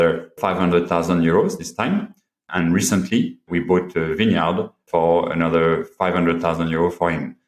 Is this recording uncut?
yes; 0 cuts

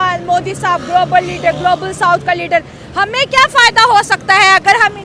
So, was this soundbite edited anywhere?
no; 0 cuts

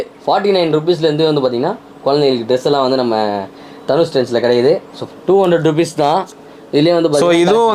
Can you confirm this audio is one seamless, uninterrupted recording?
no; 1 cut; at 5.0 s

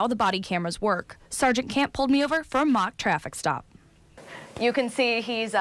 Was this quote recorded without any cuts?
yes; 0 cuts

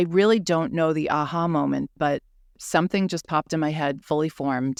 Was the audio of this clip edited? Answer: no; 0 cuts

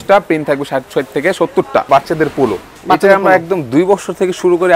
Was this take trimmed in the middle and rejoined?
yes; 1 cut; at 1.9 s

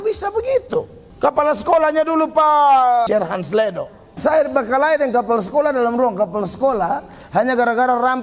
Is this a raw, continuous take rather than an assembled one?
no; 3 cuts; at 1.0 s, 3.1 s, 4.1 s

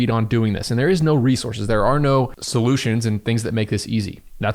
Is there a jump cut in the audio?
yes; 1 cut; at 2.4 s

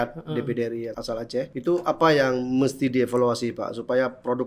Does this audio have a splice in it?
yes; 1 cut; at 1.1 s

